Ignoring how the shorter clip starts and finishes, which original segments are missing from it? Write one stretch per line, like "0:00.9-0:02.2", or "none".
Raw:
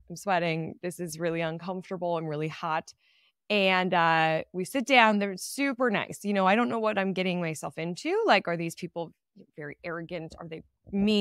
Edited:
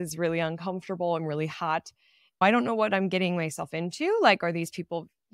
0:03.4-0:06.4

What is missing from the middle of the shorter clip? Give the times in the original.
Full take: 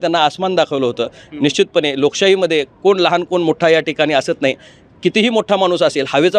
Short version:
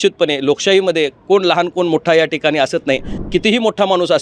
0:04.7-0:04.8

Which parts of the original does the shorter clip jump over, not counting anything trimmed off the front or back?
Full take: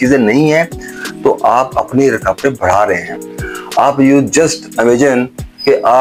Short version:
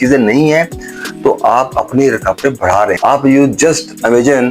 0:03.0-0:03.7

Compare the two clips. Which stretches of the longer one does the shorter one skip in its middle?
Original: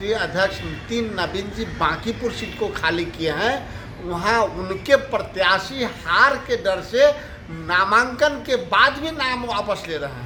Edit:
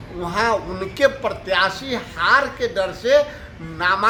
none

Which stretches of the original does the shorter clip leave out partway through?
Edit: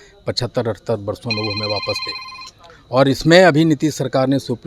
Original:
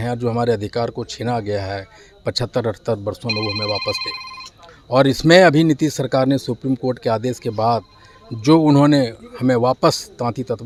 none

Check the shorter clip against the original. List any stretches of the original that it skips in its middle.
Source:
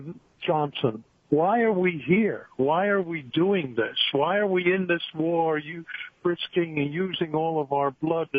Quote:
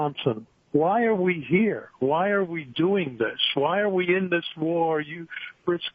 none

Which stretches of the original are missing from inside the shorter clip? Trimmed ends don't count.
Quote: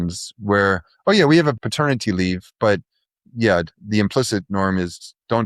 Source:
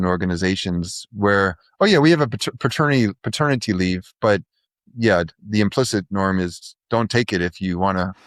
0:02.4-0:03.3

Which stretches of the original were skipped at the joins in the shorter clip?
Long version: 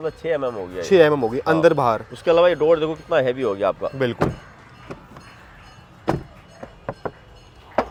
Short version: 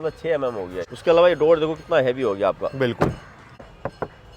0:00.8-0:02.0
0:04.7-0:06.5

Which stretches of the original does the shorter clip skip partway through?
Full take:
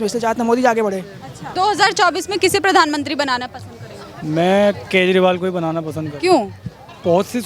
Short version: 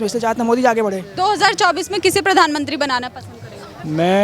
0:01.0-0:01.4

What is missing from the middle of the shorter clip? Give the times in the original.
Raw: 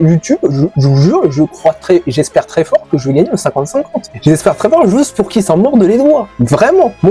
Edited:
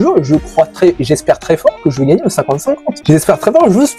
0:04.0-0:04.1

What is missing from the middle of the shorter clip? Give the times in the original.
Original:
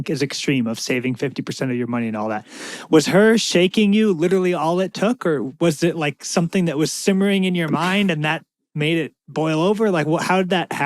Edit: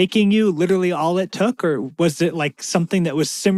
none

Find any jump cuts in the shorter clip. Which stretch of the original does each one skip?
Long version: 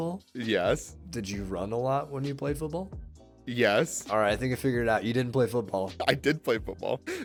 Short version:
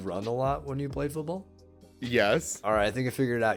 none

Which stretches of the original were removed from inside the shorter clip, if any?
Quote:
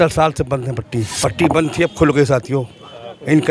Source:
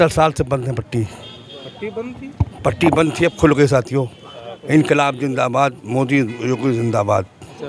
0:01.1-0:02.5

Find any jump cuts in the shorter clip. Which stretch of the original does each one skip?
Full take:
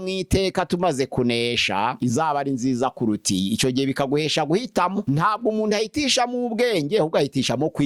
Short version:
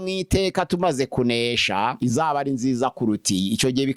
none

